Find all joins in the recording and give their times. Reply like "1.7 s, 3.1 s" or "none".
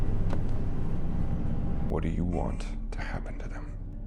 1.9 s